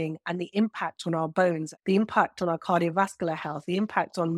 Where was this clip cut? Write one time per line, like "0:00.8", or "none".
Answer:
0:01.7